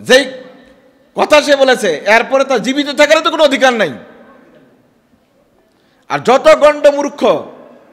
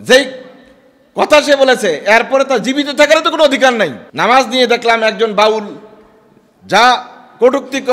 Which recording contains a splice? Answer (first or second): second